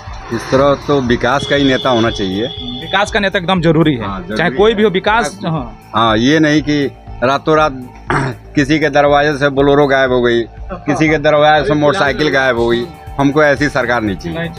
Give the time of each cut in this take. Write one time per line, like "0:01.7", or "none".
none